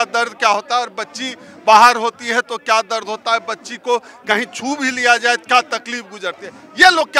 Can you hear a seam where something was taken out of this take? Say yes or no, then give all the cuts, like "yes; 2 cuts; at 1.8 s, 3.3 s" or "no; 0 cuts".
no; 0 cuts